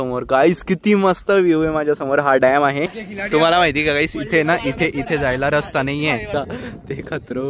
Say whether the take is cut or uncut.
cut